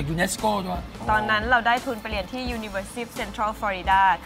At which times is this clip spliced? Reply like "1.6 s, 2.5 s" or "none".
0.9 s

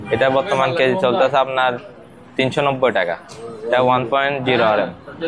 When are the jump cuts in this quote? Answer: none

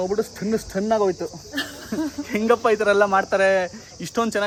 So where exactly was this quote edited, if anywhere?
none

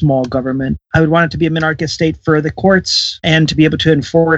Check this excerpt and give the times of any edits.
0.8 s, 3.2 s

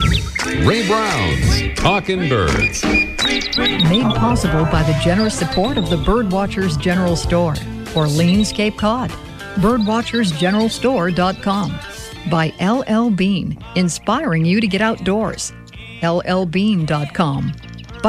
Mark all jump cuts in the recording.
none

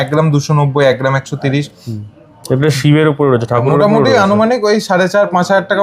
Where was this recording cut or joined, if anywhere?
none

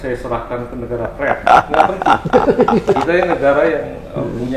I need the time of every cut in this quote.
none

